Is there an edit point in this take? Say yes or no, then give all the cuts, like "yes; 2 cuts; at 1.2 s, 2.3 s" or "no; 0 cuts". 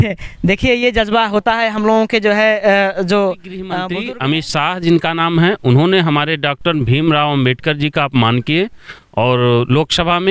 yes; 1 cut; at 3.8 s